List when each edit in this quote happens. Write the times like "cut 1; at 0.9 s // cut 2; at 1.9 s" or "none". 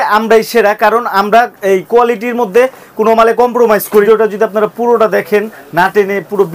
cut 1; at 4.0 s